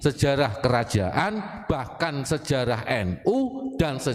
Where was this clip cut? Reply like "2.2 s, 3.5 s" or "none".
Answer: none